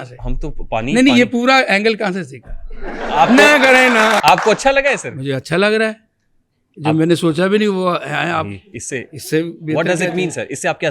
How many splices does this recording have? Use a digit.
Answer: 1